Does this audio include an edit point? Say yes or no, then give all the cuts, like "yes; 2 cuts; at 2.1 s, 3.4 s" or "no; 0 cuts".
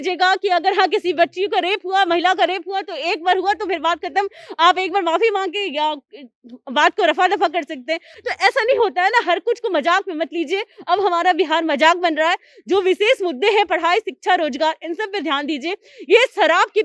no; 0 cuts